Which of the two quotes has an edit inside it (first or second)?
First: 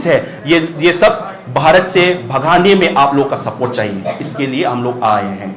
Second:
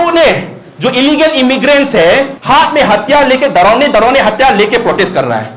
second